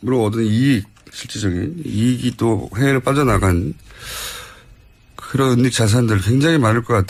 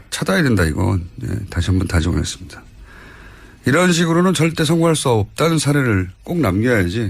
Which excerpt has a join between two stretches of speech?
second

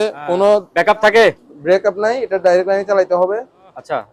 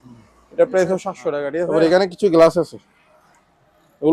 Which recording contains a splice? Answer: second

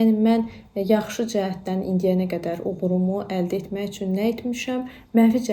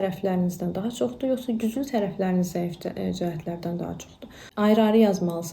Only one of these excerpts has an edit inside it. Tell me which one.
second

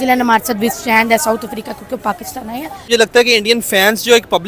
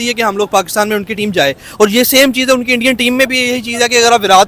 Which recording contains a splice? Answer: first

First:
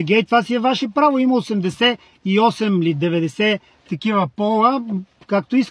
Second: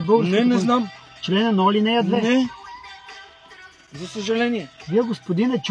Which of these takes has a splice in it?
second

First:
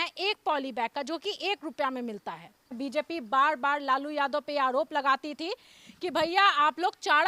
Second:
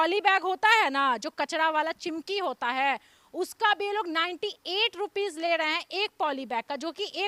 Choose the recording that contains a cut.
first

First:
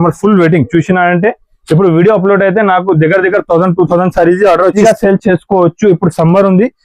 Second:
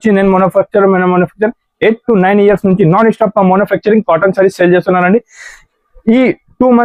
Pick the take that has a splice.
first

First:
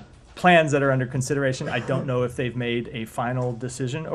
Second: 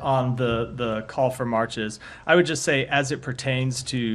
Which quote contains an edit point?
first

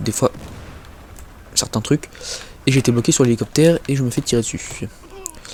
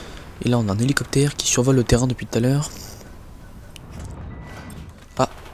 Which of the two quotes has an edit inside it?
second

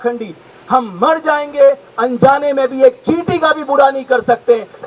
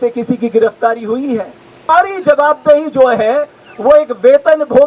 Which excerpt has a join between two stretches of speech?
second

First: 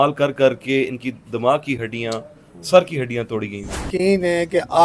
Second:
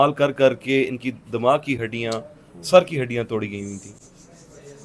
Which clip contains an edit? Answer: first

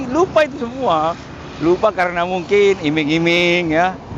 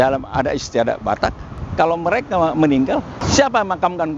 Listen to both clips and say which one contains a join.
second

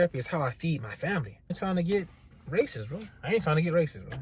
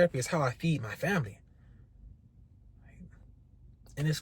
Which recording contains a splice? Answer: first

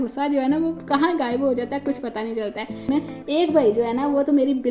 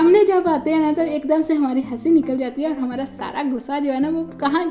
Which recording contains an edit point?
first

